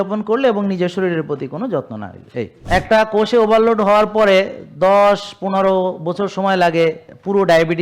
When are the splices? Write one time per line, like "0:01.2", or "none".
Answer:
0:02.6